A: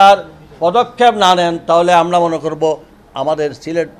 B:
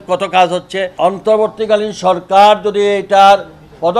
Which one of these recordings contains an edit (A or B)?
B